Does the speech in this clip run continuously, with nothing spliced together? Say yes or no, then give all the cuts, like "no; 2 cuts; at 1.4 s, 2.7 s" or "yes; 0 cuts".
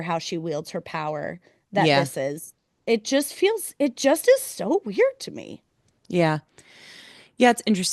yes; 0 cuts